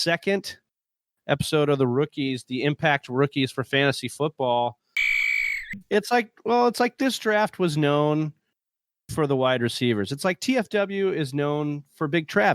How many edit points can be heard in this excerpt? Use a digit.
1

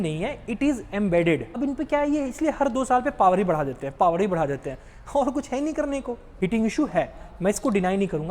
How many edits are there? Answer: 2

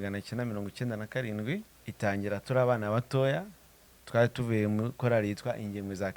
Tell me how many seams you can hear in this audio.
1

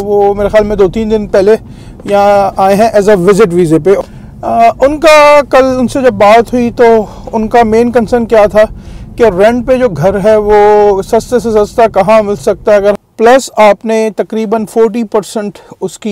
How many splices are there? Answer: 2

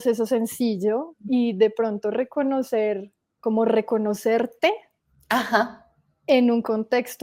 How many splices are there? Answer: 2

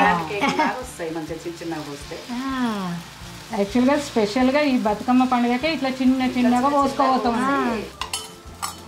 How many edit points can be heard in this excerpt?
0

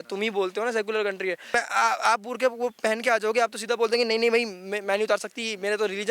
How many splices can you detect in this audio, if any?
1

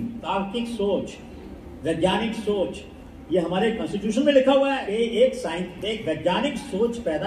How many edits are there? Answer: 1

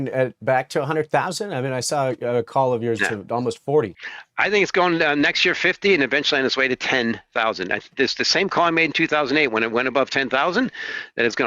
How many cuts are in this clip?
0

